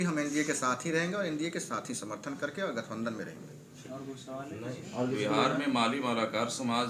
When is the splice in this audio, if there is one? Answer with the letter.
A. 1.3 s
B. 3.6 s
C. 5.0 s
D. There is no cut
D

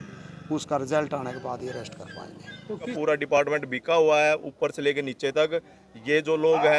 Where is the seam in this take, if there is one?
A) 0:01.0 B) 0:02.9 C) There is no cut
B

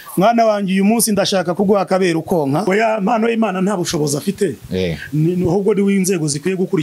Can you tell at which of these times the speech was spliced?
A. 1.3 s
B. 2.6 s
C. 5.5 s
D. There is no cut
B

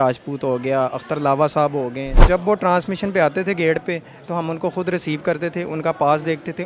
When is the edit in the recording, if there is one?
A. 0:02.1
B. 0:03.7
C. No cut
A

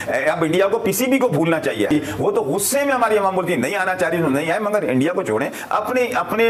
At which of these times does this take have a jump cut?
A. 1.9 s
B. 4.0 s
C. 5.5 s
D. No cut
D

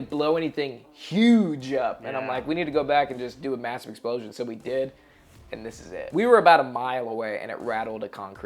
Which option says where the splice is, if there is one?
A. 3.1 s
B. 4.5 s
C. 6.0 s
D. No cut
C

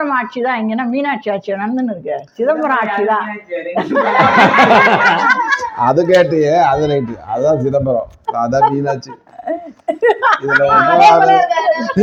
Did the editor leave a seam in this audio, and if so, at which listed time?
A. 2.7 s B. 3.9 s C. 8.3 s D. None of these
D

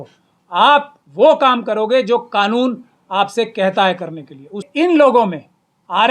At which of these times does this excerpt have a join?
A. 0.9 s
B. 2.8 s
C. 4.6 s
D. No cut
C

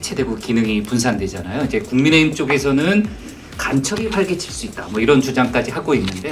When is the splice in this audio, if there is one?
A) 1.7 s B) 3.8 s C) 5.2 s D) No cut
D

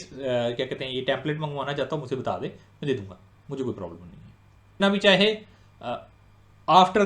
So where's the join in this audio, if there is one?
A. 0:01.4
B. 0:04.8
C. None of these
B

